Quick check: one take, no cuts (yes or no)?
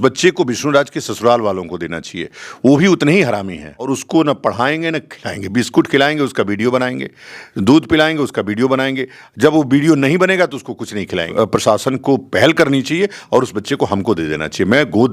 no